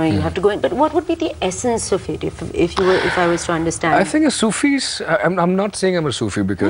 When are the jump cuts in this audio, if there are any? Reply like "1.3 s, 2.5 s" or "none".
none